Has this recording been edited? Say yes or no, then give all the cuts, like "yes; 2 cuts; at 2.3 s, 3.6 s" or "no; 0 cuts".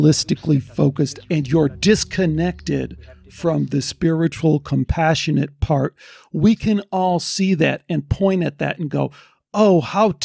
yes; 1 cut; at 1.2 s